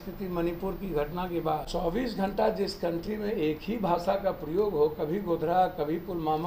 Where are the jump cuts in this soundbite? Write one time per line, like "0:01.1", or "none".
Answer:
0:01.7